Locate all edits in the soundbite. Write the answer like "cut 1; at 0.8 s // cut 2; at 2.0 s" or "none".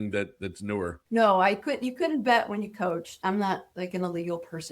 cut 1; at 3.1 s